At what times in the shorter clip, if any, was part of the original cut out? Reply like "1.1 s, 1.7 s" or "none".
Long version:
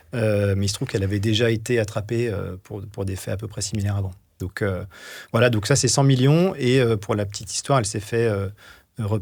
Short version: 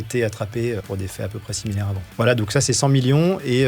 0.8 s, 2.0 s